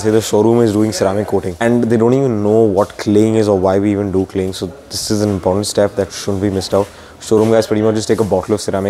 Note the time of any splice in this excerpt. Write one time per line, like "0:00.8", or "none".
0:01.5

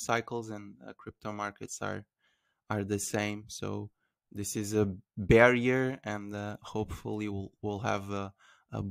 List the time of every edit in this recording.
none

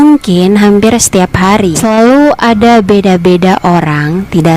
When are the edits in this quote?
0:01.8

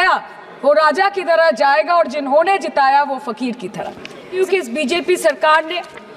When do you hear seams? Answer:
0:04.4

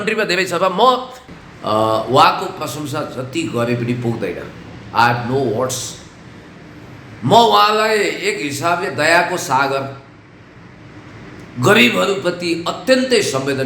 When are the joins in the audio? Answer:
0:01.2

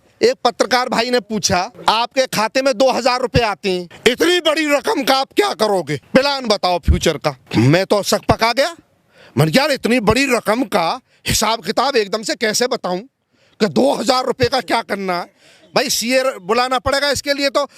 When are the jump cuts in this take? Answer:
0:01.7
0:03.9
0:06.0
0:07.4

